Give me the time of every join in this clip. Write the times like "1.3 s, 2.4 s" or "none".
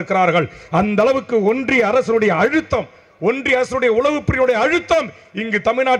none